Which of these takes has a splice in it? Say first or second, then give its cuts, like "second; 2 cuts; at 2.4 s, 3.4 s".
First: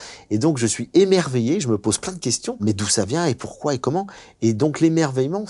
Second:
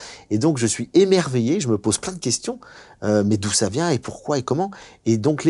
first; 1 cut; at 2.6 s